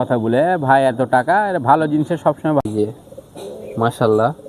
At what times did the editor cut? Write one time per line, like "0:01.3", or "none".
0:02.6